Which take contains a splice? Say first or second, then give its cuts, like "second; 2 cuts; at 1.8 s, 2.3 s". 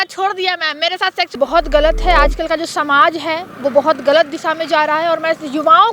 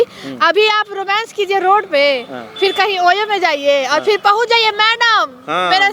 first; 1 cut; at 1.3 s